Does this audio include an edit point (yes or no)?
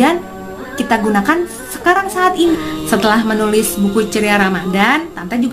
yes